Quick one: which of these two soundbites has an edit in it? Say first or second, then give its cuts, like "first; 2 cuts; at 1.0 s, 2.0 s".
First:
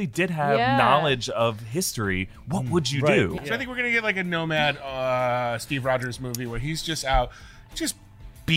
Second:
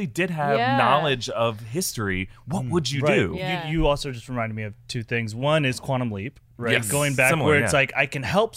first; 1 cut; at 3.4 s